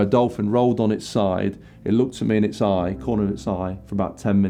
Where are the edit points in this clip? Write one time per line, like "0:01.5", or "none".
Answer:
none